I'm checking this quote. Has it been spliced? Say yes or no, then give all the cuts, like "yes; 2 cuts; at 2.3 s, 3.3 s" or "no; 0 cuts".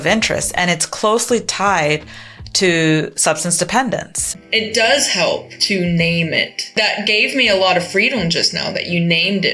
yes; 3 cuts; at 4.3 s, 5.6 s, 6.7 s